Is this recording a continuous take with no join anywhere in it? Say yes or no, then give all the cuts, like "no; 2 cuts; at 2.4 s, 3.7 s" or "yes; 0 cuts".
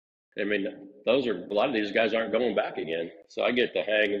no; 1 cut; at 1.5 s